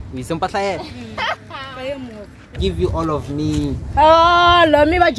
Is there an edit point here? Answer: yes; 1 cut; at 2.6 s

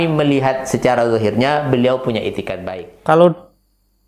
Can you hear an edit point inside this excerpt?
yes; 1 cut; at 2.5 s

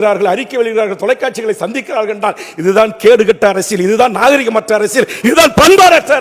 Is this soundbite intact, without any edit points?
yes; 0 cuts

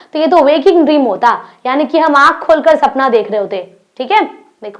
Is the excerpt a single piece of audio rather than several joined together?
yes; 0 cuts

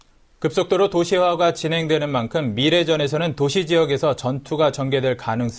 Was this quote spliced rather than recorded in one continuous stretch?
yes; 1 cut; at 2.5 s

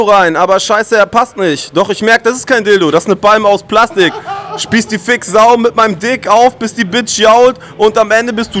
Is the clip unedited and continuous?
yes; 0 cuts

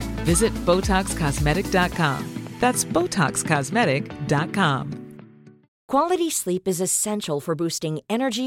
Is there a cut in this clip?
yes; 1 cut; at 5.7 s

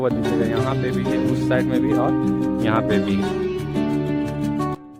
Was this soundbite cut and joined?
no; 0 cuts

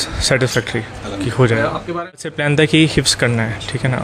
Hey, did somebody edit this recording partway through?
yes; 1 cut; at 2.2 s

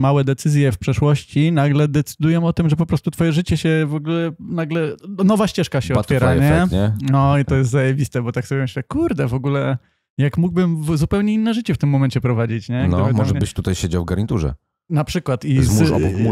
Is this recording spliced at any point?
no; 0 cuts

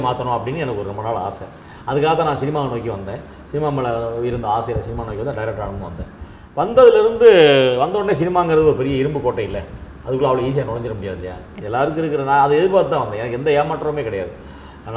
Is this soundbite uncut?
yes; 0 cuts

